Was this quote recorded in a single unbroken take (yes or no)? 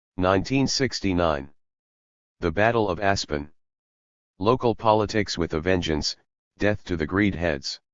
no